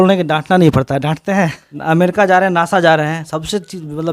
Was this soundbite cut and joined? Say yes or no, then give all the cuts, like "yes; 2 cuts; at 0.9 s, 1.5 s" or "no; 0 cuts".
yes; 1 cut; at 1.7 s